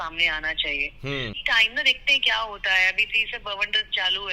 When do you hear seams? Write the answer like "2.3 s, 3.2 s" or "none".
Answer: 1.4 s

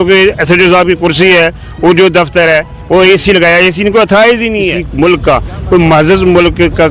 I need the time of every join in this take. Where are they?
4.8 s

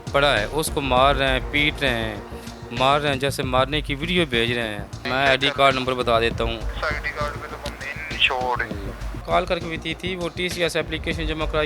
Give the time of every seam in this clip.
5.0 s

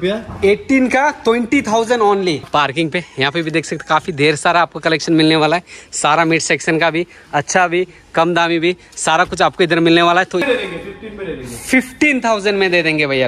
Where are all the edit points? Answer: 2.5 s, 10.4 s

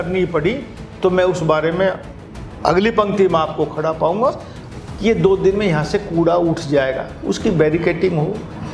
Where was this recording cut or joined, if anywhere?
4.7 s

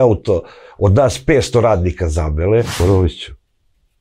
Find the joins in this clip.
2.7 s

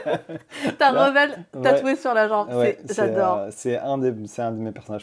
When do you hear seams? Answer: none

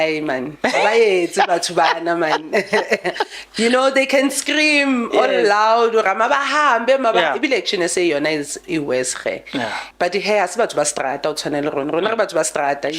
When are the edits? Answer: 9.8 s

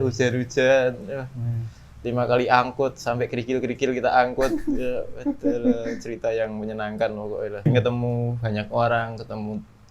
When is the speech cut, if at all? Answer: 7.7 s

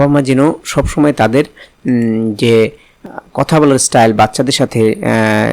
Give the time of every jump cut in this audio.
3.0 s

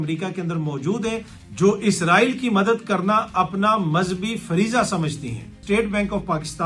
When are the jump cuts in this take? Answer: 5.6 s

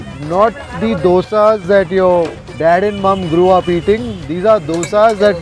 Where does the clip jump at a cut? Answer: 2.4 s

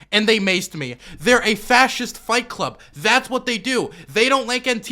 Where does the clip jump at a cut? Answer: 0.9 s

